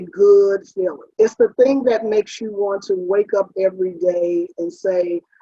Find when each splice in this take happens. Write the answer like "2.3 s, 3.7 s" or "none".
1.0 s